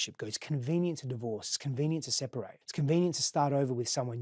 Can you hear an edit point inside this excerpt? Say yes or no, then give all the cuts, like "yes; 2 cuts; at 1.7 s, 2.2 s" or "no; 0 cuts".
yes; 1 cut; at 2.6 s